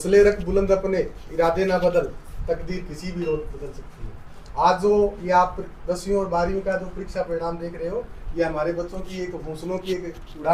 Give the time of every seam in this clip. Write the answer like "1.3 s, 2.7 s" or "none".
none